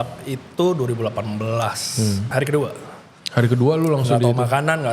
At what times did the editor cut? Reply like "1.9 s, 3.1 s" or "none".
2.3 s